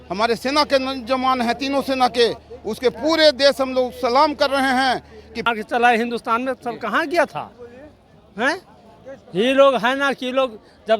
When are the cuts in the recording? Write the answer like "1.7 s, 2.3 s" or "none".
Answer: 5.3 s